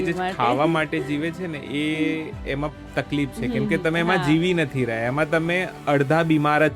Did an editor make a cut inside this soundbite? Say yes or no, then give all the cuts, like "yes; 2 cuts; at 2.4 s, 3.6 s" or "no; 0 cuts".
yes; 1 cut; at 5.7 s